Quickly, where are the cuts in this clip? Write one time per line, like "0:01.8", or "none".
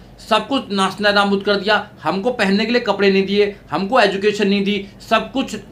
none